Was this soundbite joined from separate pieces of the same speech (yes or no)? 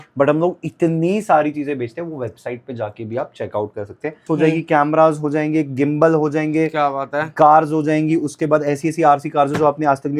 yes